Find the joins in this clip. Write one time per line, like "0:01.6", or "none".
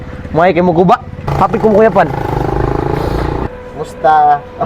0:01.2